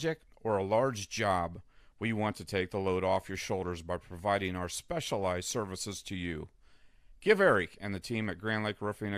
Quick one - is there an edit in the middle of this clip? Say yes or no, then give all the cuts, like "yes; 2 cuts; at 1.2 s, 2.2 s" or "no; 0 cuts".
no; 0 cuts